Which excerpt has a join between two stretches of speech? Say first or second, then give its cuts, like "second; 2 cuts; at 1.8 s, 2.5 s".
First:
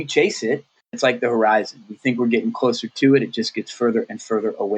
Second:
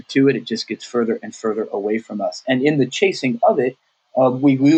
first; 1 cut; at 1.0 s